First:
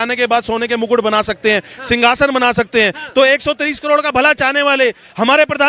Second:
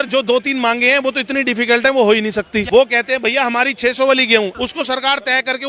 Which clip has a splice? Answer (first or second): second